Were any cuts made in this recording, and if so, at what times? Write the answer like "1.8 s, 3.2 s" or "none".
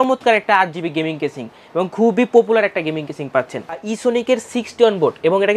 3.9 s

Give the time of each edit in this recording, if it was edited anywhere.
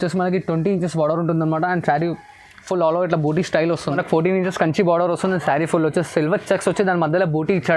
3.9 s

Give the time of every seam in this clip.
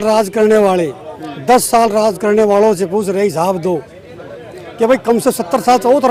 none

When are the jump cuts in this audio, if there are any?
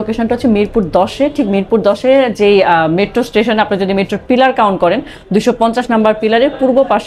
none

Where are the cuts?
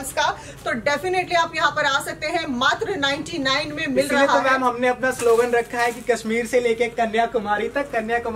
none

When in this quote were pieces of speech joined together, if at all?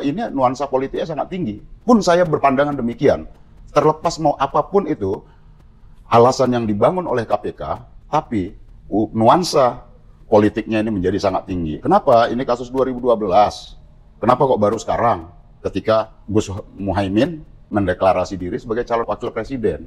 16.2 s, 17.6 s, 19.0 s

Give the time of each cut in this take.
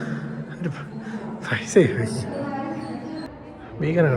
3.3 s

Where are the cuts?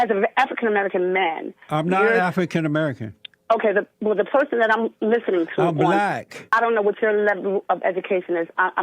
6.4 s

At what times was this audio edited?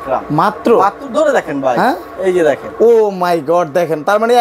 none

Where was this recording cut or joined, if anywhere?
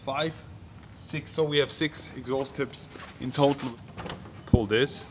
3.7 s

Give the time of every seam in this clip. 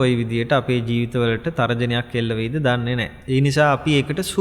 3.1 s

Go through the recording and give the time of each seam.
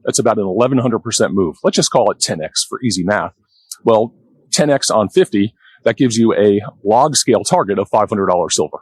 none

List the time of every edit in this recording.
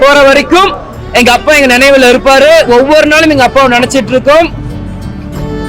4.7 s

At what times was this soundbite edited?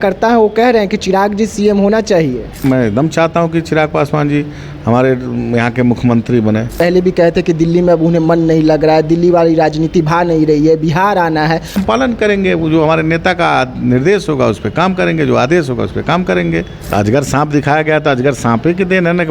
2.6 s, 6.7 s, 11.7 s, 16.8 s

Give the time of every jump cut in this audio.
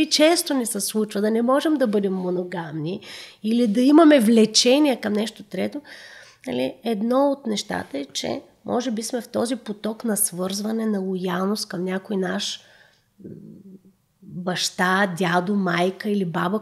none

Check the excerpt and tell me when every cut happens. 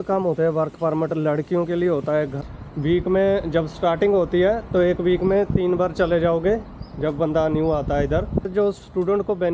2.3 s, 8.5 s

